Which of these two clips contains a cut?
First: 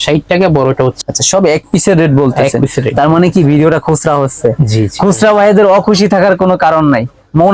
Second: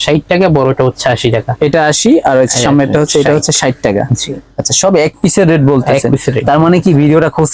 first; 1 cut; at 1.0 s

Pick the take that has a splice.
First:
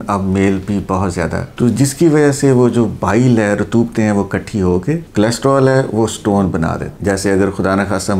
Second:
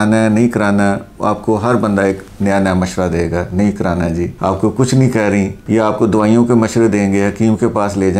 first; 3 cuts; at 1.5 s, 5.1 s, 6.9 s

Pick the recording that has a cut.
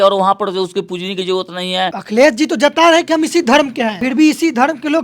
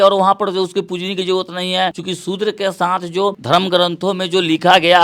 first; 2 cuts; at 2.0 s, 4.0 s

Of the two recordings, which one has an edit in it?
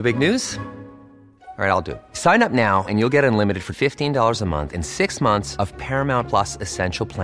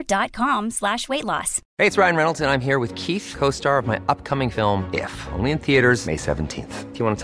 second; 1 cut; at 1.6 s

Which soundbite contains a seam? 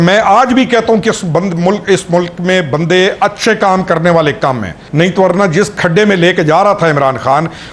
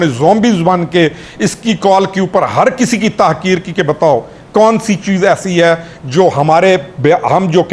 first; 1 cut; at 4.8 s

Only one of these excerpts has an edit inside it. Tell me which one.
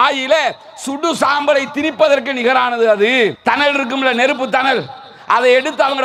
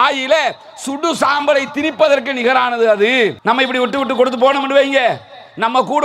second; 1 cut; at 3.4 s

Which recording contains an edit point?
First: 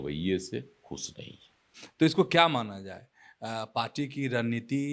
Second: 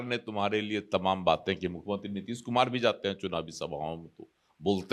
first; 1 cut; at 1.8 s

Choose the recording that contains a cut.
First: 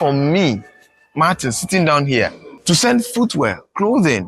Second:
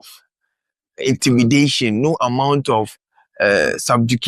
first; 1 cut; at 2.5 s

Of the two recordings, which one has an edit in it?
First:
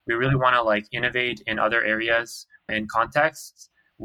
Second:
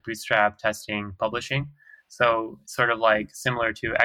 first; 1 cut; at 2.7 s

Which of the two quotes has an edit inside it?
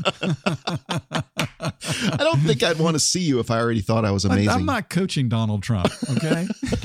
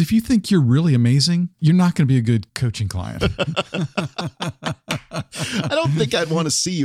second; 2 cuts; at 1.5 s, 2.6 s

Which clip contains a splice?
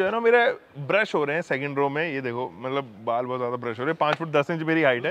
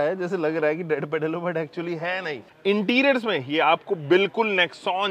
second; 1 cut; at 2.5 s

